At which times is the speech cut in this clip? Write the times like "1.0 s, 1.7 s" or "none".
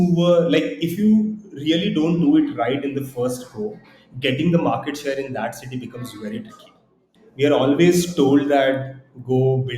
6.9 s